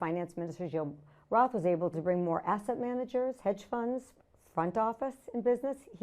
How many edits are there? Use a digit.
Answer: 1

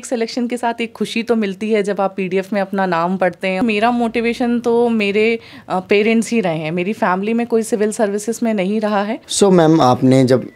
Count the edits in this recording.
2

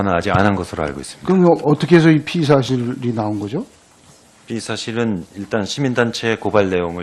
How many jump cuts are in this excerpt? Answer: 0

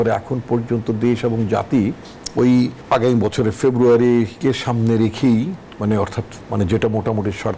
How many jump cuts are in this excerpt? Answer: 0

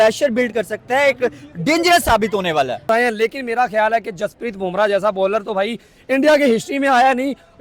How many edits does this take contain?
1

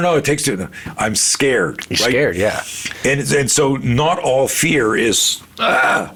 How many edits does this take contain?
0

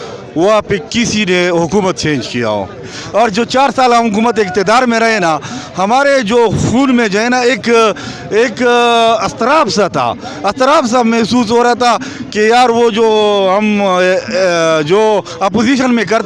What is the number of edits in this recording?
1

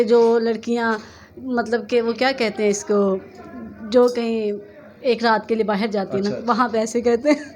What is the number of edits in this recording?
0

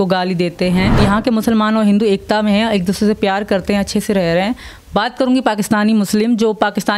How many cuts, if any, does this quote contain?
1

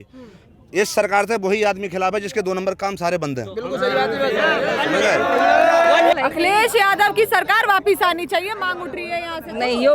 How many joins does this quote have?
1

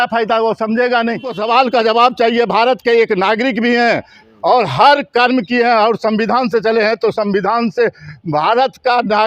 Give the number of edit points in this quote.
1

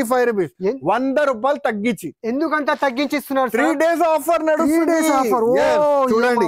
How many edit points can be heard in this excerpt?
0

